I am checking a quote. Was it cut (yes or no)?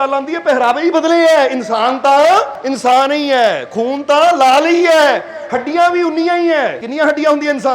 yes